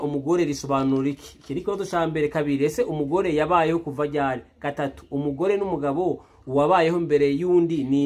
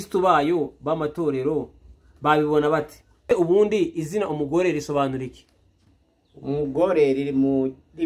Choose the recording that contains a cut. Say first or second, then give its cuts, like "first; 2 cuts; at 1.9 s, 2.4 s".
second; 1 cut; at 3.2 s